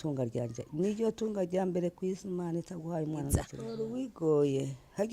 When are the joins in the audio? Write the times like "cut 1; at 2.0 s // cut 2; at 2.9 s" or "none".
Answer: cut 1; at 3.6 s